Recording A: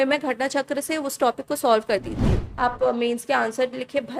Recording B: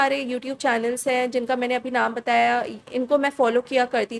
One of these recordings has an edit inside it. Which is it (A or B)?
A